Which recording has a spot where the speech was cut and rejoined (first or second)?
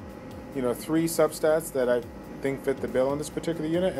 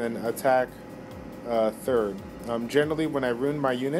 first